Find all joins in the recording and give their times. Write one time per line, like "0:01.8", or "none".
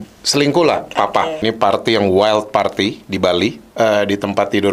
0:01.4
0:03.6